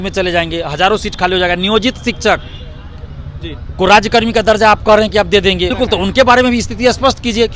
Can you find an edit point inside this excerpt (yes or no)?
yes